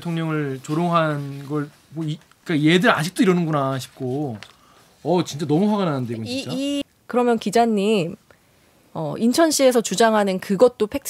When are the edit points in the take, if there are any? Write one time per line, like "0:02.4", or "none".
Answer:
0:06.9